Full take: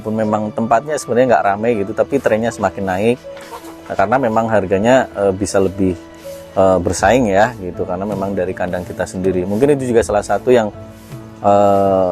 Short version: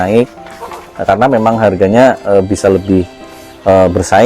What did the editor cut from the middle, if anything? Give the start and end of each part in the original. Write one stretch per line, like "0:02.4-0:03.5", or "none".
none